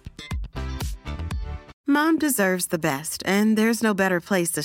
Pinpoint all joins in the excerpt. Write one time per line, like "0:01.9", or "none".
0:01.7